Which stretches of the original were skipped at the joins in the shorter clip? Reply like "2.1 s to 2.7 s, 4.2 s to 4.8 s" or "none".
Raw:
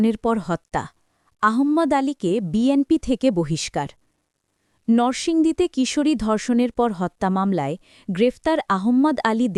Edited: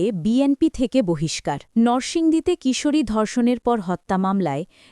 3.9 s to 4.8 s